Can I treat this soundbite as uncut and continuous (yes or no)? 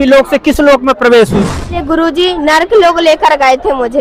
no